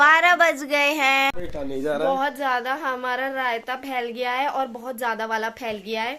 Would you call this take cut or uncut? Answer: cut